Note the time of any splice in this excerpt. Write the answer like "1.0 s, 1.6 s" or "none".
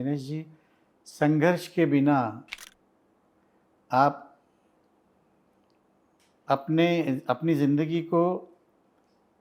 none